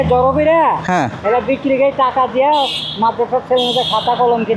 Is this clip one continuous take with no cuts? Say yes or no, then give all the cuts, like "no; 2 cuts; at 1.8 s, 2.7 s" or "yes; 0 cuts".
yes; 0 cuts